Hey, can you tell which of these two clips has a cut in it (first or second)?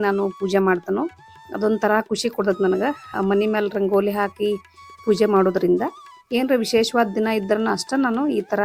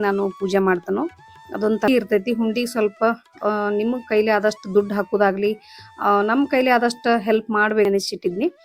second